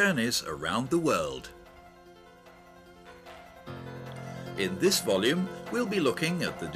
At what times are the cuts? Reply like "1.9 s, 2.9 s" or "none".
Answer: none